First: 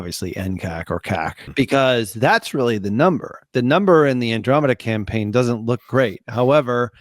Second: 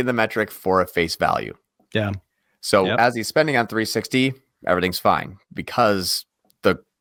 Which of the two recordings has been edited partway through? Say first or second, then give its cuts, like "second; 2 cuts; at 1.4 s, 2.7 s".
first; 2 cuts; at 1.4 s, 3.4 s